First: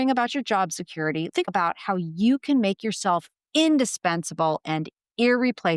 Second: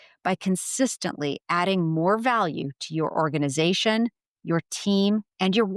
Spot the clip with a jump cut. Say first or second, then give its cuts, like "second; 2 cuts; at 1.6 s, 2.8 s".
first; 2 cuts; at 1.3 s, 3.4 s